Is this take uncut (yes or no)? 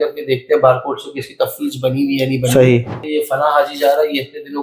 no